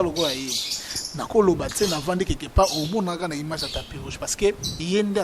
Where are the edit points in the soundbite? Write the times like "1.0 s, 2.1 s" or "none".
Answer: none